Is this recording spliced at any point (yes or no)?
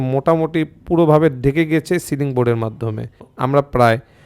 yes